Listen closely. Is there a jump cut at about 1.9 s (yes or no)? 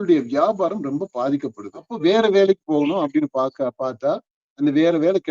yes